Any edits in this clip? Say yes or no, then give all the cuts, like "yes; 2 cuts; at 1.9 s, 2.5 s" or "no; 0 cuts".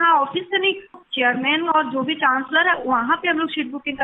yes; 1 cut; at 1.0 s